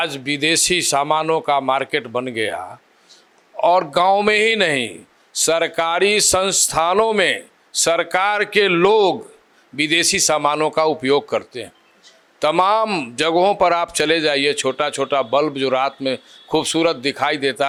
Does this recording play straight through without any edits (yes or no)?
yes